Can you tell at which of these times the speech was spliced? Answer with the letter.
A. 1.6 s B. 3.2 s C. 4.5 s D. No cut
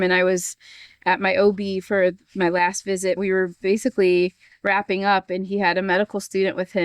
B